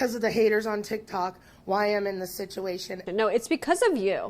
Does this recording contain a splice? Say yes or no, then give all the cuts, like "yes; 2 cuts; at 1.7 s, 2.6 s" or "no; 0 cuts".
yes; 1 cut; at 3.0 s